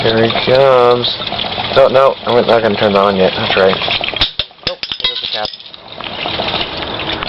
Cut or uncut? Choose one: cut